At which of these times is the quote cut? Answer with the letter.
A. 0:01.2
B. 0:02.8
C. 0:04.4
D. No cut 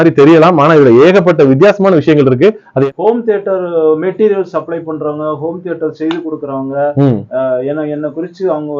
B